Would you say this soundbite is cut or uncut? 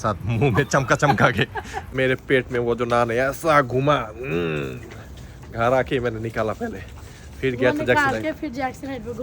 cut